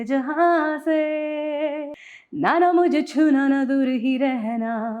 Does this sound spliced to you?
yes; 1 cut; at 1.9 s

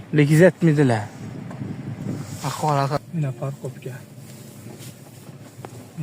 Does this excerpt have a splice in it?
yes; 1 cut; at 3.0 s

